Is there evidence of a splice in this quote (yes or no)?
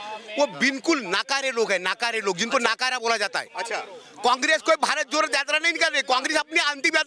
no